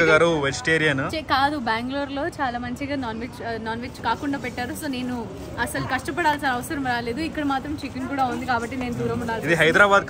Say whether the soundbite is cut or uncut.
uncut